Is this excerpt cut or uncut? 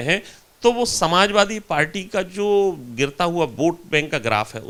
uncut